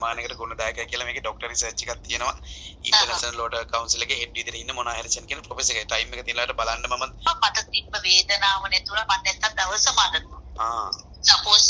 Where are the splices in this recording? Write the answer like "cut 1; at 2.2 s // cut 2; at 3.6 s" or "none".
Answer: cut 1; at 7.3 s